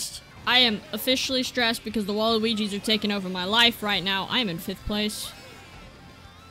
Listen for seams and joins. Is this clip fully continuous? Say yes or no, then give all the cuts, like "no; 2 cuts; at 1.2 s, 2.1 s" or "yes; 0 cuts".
yes; 0 cuts